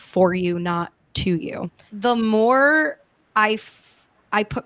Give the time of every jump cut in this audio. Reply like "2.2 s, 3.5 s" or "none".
1.8 s